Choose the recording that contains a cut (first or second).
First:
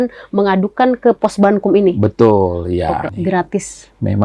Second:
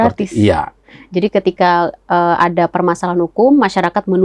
first